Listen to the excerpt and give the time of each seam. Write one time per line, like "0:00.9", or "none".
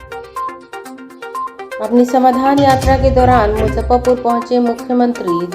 0:00.9